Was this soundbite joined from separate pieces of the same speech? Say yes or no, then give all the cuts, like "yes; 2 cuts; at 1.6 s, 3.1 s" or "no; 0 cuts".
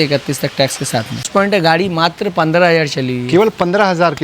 yes; 1 cut; at 1.3 s